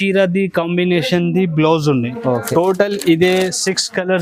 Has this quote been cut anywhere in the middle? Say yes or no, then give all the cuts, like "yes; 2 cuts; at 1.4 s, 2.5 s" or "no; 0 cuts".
no; 0 cuts